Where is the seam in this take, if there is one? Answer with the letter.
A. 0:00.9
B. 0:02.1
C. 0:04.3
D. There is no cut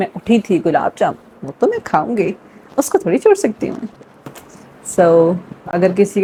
D